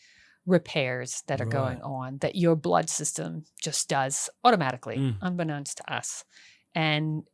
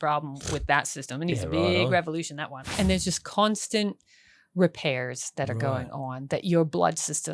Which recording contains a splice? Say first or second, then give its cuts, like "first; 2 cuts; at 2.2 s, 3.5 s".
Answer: second; 1 cut; at 2.6 s